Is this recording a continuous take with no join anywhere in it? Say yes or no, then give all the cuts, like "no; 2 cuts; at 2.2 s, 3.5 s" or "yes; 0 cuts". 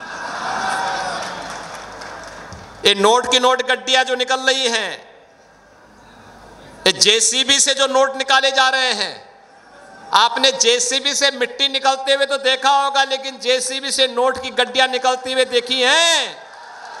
yes; 0 cuts